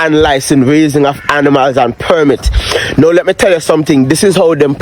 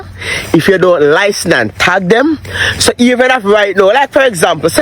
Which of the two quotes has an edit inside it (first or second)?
second